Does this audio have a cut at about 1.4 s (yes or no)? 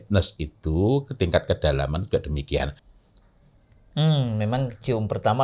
no